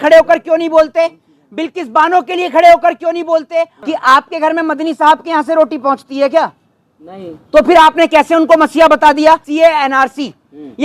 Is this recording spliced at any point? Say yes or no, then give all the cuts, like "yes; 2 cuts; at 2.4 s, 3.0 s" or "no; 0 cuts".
yes; 2 cuts; at 3.8 s, 9.5 s